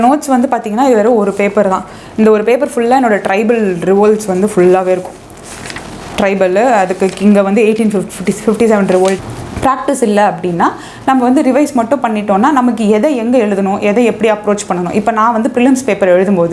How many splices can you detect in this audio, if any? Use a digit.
1